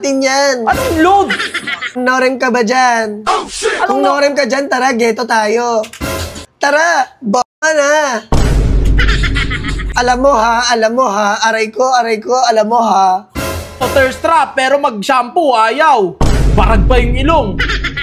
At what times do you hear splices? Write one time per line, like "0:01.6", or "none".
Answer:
0:02.0
0:06.5
0:09.8
0:13.8